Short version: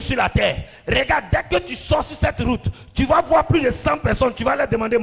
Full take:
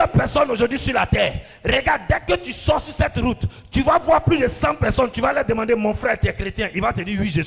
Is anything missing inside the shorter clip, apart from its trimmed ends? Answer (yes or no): no